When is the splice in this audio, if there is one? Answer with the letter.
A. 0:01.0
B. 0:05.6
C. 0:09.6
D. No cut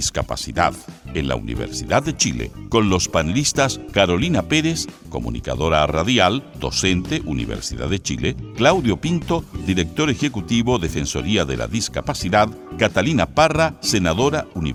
D